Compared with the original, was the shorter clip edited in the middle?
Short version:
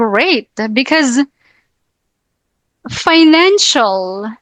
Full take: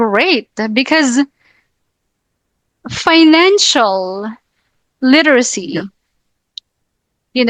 no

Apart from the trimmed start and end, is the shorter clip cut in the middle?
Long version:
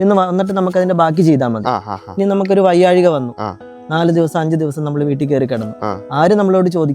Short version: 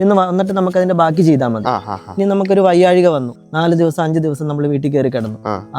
yes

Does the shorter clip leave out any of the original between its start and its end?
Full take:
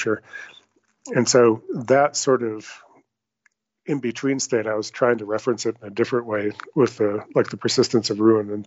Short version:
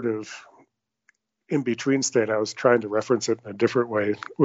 no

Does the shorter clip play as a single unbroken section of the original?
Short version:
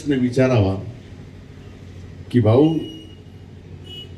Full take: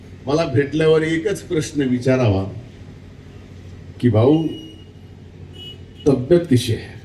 yes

